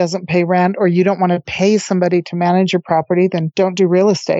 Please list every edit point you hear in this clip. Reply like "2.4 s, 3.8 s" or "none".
3.5 s